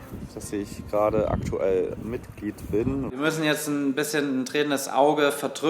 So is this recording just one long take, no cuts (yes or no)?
no